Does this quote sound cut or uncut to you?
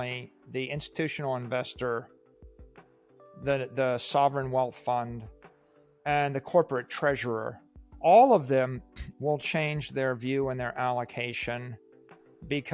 uncut